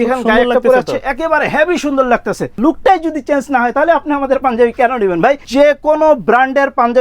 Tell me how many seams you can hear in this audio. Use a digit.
2